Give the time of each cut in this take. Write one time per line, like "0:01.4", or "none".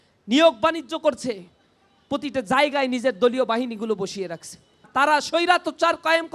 0:04.8